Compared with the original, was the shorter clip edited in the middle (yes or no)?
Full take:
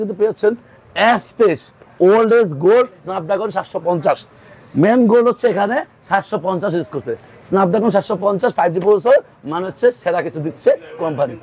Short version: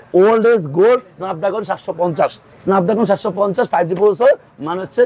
yes